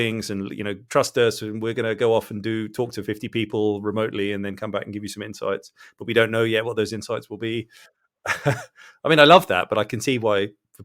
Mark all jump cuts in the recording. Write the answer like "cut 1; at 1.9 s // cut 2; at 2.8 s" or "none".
none